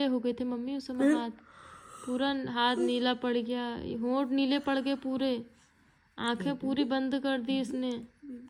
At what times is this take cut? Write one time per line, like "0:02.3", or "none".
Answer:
none

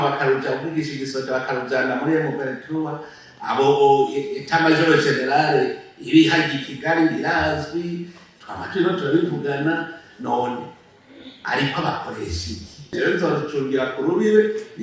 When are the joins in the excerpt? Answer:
0:12.9

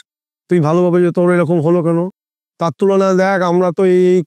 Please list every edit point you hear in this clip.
0:02.1

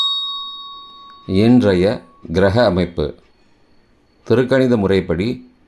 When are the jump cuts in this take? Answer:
0:01.1

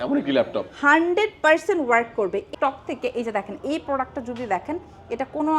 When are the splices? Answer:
0:02.5

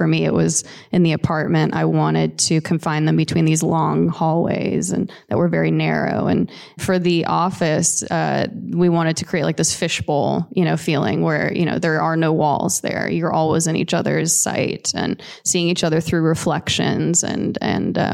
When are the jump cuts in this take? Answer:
0:06.8

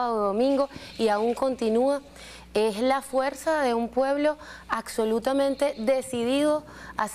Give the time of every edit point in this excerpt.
none

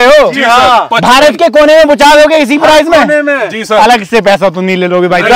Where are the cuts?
none

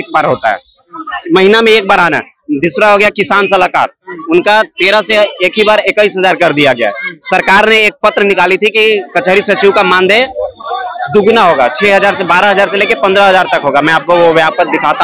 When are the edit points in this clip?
none

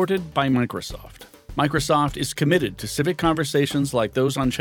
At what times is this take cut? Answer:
none

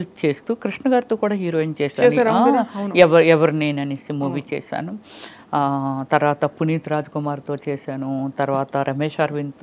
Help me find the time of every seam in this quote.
none

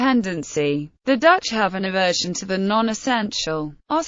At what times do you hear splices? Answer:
0:02.3

